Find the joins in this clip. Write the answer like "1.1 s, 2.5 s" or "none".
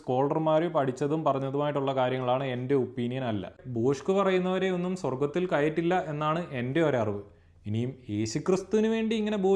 3.5 s